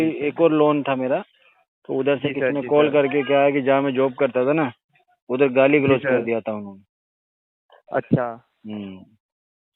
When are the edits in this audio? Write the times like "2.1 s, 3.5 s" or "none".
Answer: none